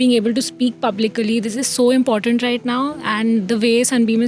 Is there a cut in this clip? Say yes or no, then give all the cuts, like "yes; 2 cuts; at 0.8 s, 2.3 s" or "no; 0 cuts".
no; 0 cuts